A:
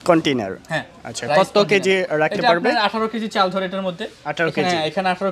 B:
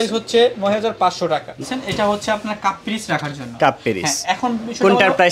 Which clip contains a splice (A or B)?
B